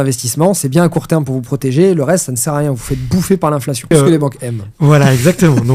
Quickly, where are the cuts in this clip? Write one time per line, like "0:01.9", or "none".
0:03.9